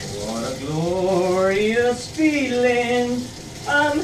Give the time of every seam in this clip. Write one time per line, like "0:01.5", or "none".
none